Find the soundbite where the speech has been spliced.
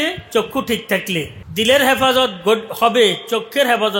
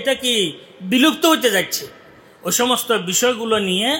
first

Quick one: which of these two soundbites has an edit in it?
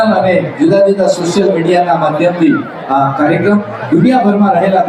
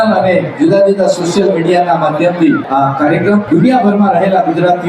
second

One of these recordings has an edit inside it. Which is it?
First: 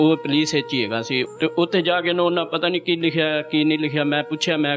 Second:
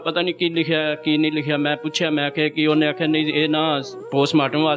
first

